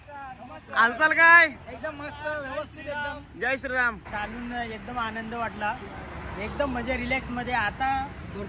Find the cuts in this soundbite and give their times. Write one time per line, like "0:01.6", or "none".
0:04.0